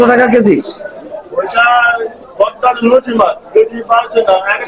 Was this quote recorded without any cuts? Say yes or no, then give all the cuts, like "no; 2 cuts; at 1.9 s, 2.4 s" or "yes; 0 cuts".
yes; 0 cuts